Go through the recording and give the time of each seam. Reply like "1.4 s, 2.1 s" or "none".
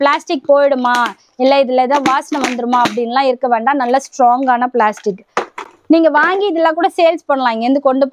none